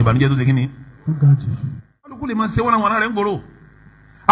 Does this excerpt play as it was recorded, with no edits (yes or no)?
no